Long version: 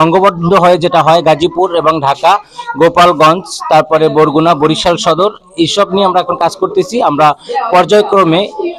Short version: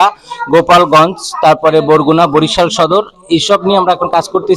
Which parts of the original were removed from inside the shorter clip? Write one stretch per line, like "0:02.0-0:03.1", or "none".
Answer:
none